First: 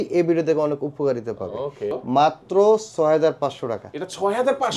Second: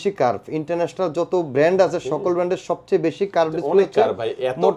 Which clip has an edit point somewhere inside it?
first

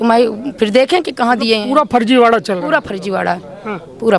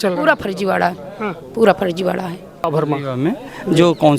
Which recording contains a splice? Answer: second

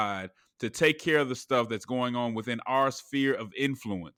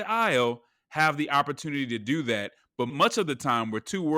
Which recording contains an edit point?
second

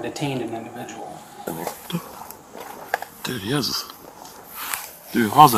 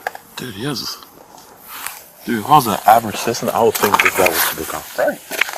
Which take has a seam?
first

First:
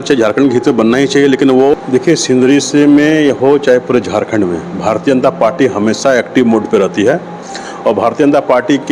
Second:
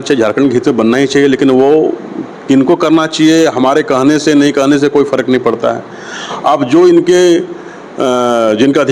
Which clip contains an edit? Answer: first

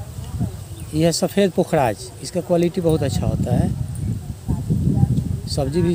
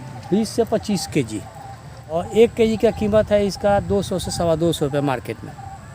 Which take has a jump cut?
second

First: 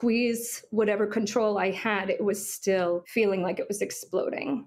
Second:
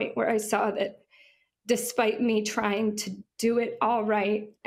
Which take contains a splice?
first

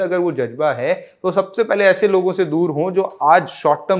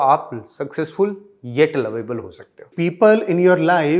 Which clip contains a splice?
second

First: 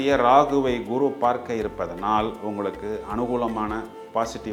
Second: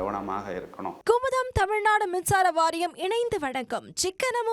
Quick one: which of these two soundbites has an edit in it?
second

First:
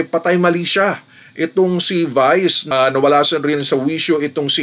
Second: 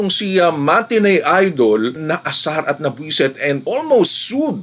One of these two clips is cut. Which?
first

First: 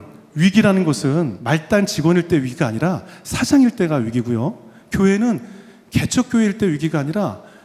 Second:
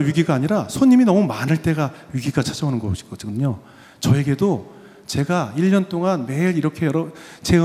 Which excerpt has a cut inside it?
first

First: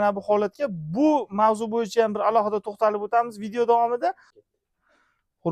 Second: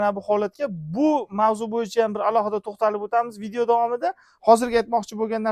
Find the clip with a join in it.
first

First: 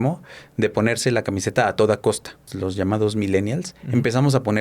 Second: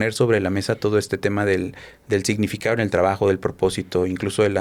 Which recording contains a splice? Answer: first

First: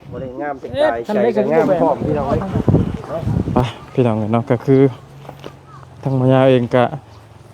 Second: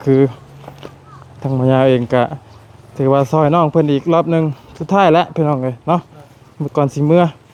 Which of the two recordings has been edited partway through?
first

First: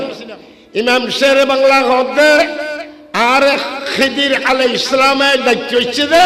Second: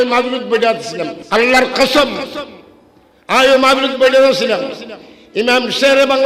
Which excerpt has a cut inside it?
second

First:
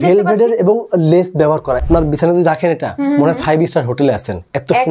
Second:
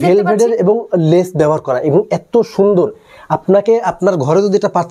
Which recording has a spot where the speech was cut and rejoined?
first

